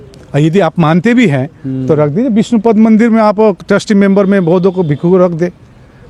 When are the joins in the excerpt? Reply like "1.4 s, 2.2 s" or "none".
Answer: none